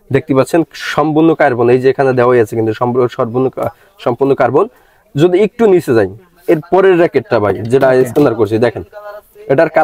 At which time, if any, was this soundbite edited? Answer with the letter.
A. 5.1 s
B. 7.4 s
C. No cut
C